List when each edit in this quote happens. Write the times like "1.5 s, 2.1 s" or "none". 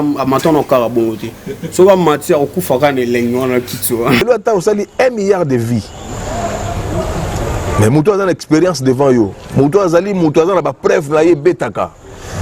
4.2 s